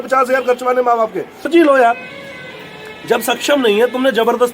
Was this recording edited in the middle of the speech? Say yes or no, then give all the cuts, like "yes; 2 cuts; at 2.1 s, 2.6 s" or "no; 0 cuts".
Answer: yes; 1 cut; at 1.5 s